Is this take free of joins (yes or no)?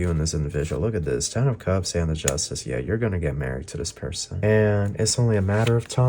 no